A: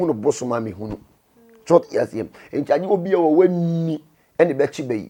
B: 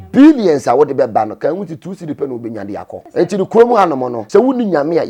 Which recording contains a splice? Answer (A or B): B